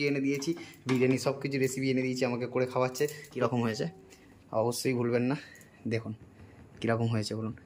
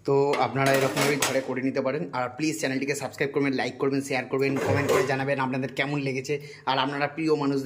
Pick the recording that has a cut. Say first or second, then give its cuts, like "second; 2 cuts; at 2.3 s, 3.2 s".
first; 1 cut; at 3.2 s